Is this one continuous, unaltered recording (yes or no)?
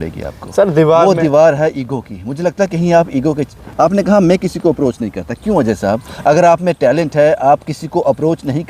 yes